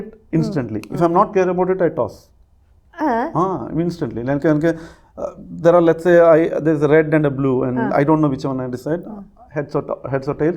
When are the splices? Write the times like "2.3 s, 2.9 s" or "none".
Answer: none

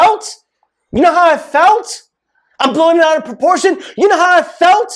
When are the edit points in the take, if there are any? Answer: none

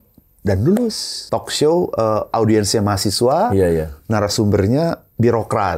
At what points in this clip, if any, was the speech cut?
1.1 s

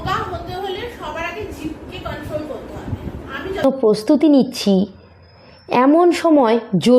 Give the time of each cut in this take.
3.6 s

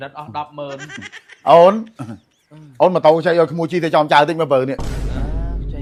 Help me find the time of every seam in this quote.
none

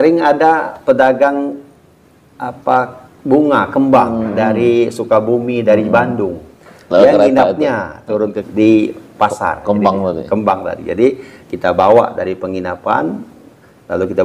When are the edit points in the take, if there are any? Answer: 8.4 s

